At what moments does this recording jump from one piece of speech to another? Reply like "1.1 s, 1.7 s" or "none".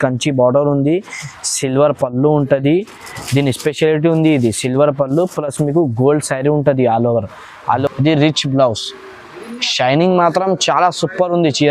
7.8 s